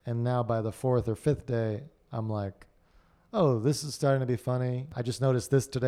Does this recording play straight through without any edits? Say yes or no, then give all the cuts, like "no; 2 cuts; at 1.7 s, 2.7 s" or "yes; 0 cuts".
no; 1 cut; at 4.9 s